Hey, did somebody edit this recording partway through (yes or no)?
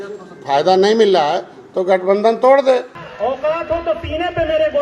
yes